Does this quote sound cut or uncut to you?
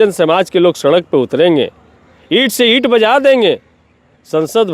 uncut